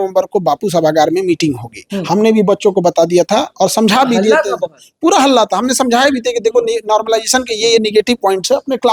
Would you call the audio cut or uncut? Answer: uncut